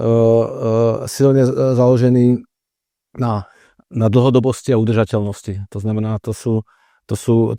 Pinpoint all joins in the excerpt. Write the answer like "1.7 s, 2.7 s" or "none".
none